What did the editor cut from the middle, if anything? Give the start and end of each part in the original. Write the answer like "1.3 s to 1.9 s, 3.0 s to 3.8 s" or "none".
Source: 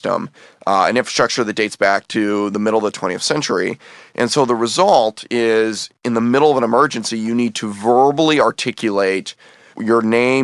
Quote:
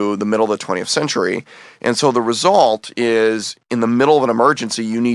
none